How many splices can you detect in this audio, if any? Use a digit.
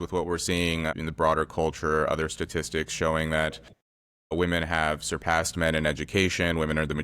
1